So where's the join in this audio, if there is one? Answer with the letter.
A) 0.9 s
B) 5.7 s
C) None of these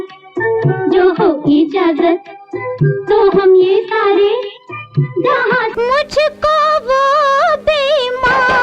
B